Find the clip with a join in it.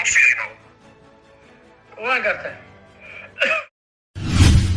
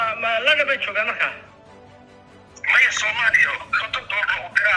first; 1 cut; at 3.7 s

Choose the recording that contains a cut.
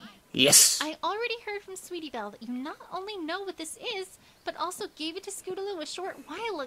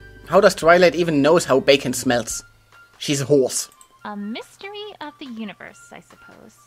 first; 1 cut; at 5.6 s

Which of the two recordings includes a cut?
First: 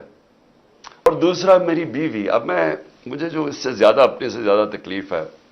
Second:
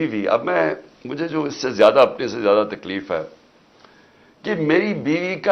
first; 1 cut; at 1.1 s

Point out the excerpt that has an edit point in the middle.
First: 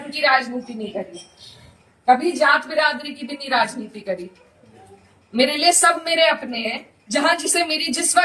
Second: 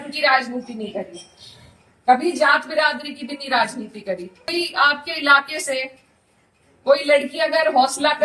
second; 1 cut; at 4.5 s

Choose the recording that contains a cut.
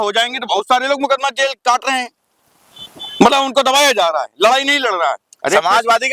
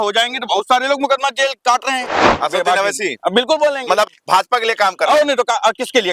second; 1 cut; at 2.3 s

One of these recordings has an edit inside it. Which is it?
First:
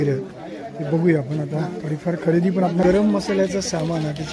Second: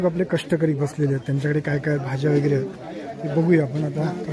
first; 1 cut; at 2.8 s

